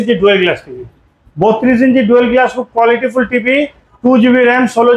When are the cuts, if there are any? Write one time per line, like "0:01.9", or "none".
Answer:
none